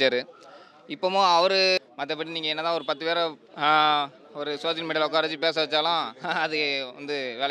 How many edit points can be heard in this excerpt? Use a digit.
1